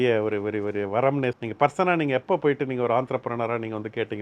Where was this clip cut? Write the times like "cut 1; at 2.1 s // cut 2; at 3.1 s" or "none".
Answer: cut 1; at 1.4 s

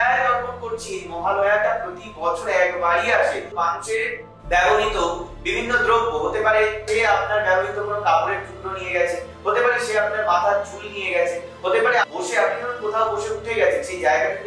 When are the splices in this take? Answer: cut 1; at 3.5 s // cut 2; at 6.8 s // cut 3; at 12.0 s

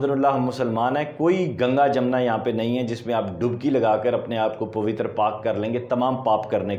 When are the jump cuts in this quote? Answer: none

